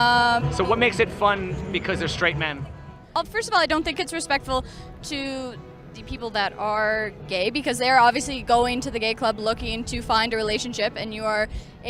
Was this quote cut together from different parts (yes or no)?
yes